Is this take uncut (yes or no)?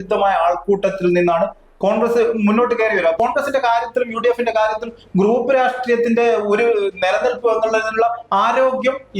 no